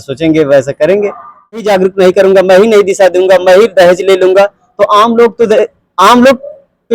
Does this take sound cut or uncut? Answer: cut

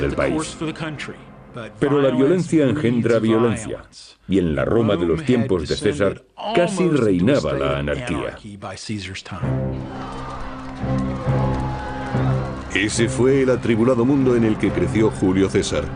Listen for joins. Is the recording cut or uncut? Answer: cut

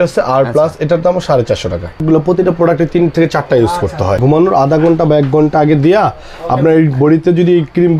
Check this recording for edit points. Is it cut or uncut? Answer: cut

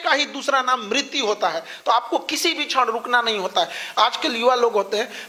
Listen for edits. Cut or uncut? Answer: uncut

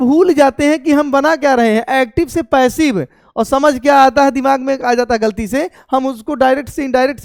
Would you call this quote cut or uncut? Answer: uncut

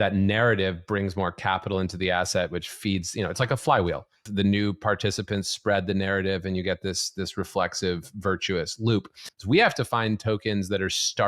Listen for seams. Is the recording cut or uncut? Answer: cut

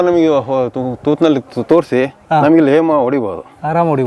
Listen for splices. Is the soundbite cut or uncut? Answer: uncut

